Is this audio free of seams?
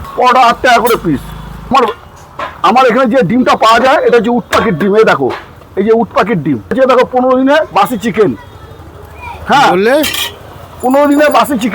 no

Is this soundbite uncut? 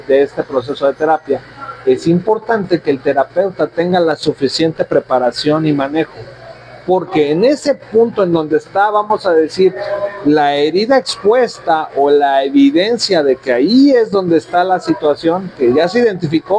yes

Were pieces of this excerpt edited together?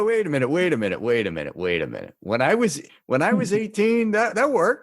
yes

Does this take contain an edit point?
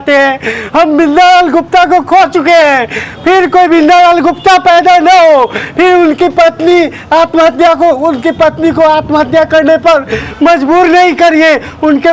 no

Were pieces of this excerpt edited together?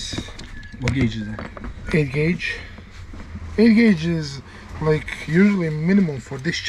no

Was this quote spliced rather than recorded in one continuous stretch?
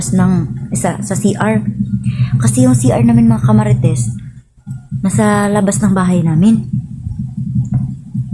no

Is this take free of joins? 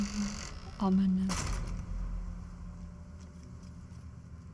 yes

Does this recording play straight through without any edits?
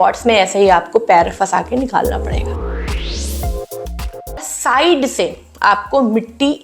no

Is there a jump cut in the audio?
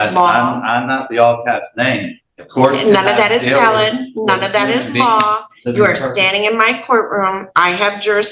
no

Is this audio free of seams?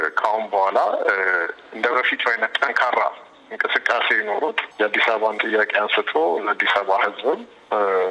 yes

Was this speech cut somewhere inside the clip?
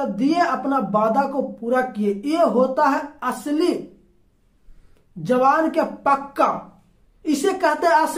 no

